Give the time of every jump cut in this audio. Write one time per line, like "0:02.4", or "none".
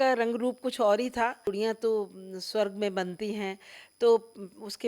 0:01.5